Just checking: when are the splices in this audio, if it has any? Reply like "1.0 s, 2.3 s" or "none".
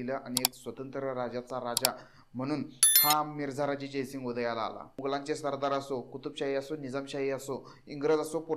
4.9 s